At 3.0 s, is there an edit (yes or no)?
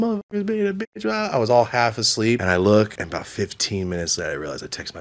yes